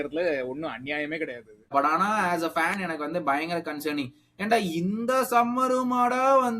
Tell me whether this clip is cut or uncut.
cut